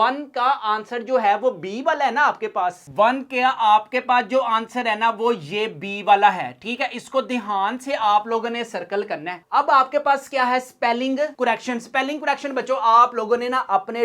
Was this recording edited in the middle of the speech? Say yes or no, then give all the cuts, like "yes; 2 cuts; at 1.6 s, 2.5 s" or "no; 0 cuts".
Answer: yes; 2 cuts; at 2.9 s, 9.4 s